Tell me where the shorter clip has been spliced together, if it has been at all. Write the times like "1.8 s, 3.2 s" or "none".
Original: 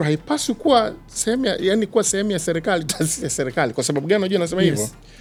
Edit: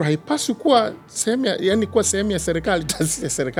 none